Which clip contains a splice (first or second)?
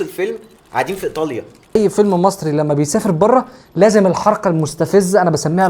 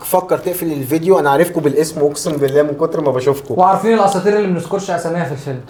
first